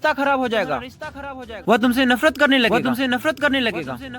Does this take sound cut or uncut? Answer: cut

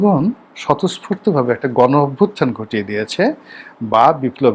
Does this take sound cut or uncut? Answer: uncut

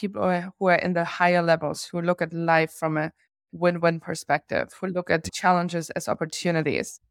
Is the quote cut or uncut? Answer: uncut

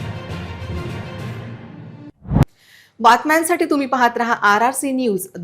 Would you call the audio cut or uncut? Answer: uncut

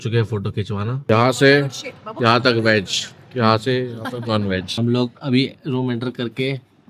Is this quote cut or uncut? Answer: cut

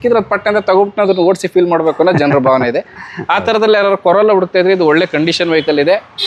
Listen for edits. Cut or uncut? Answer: uncut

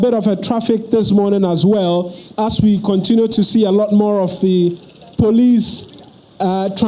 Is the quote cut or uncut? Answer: uncut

